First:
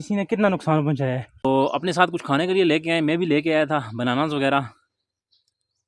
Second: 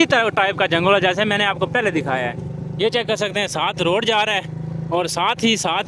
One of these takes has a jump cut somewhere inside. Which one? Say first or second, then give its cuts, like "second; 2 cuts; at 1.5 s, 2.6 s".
first; 1 cut; at 1.4 s